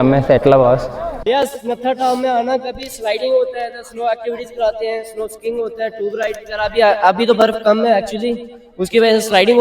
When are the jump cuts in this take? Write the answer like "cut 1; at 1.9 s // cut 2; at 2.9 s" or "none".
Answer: cut 1; at 1.2 s

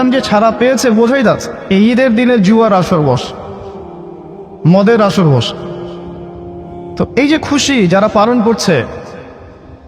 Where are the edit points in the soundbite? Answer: cut 1; at 1.6 s

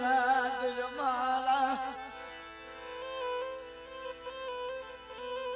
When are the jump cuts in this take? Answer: none

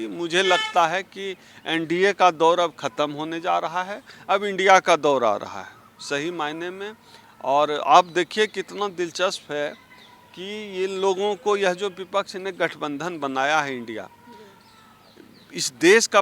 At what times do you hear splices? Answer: none

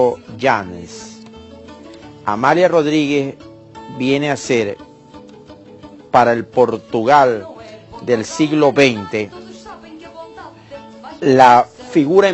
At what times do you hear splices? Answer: cut 1; at 11.0 s

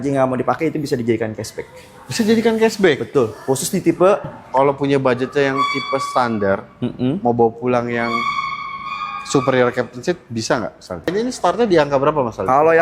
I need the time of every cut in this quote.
cut 1; at 4.4 s // cut 2; at 11.1 s

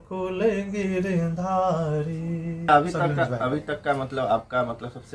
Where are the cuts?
cut 1; at 2.7 s

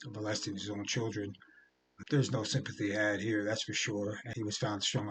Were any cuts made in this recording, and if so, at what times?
cut 1; at 1.9 s // cut 2; at 4.3 s

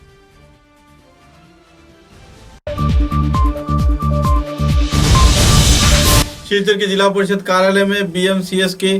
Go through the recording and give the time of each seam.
cut 1; at 6.3 s

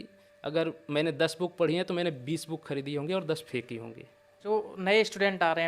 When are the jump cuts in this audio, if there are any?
cut 1; at 4.4 s

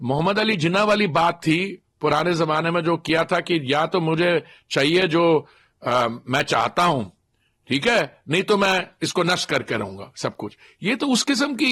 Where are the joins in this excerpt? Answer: none

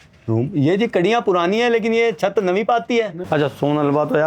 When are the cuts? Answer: cut 1; at 3.2 s

